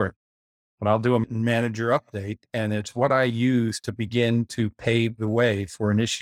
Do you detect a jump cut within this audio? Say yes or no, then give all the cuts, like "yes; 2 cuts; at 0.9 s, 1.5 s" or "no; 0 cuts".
yes; 1 cut; at 1.3 s